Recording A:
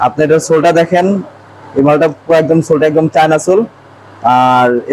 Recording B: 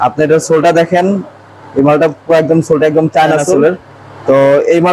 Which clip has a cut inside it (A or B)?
B